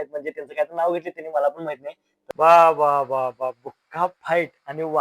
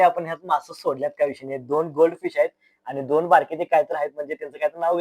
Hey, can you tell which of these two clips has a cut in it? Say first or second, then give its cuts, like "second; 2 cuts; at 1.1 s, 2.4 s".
first; 1 cut; at 2.1 s